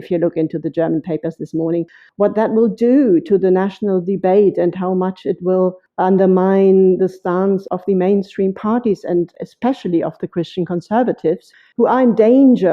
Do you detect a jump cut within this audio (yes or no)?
yes